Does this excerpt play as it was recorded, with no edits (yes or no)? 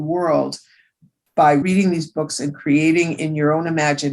no